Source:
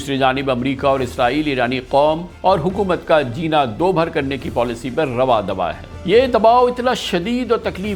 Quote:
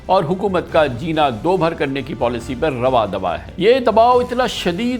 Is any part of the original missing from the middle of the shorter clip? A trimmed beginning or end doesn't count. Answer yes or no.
yes